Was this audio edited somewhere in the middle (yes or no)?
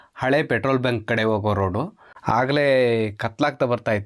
yes